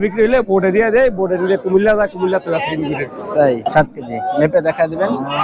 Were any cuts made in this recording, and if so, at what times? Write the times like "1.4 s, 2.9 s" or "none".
3.7 s